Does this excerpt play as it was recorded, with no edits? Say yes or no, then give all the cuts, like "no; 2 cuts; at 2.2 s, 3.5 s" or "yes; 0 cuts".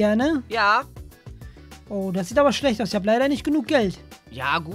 yes; 0 cuts